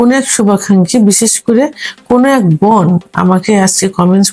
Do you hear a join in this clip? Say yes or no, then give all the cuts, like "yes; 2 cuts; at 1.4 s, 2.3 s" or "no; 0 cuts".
no; 0 cuts